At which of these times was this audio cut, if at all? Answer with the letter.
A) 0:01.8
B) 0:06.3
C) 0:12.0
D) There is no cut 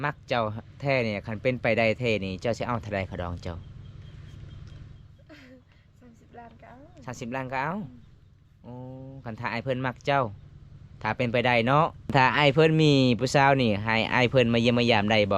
C